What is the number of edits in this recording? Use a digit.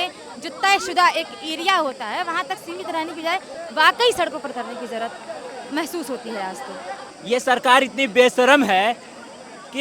1